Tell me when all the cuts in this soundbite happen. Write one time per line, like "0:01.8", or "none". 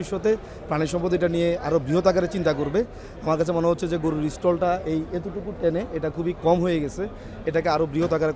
none